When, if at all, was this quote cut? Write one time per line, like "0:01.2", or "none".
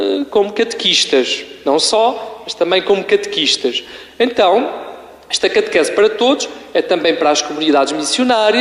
none